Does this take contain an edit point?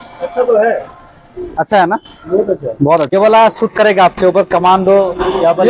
yes; 1 cut; at 3.1 s

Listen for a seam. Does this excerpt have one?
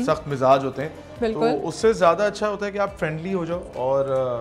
no; 0 cuts

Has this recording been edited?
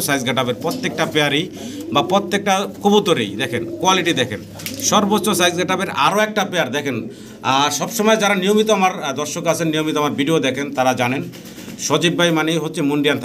yes; 1 cut; at 6.1 s

